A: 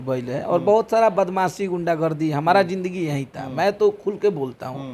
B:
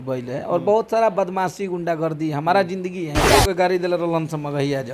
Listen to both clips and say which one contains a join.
B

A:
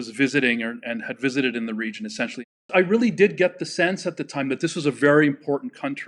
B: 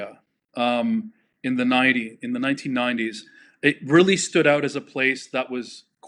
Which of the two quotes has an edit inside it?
A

